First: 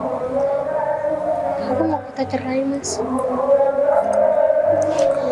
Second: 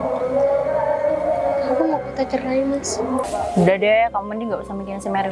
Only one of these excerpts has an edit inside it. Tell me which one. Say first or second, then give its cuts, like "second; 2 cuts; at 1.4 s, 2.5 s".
second; 1 cut; at 3.2 s